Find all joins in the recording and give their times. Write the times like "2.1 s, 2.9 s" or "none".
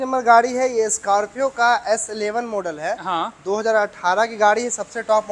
none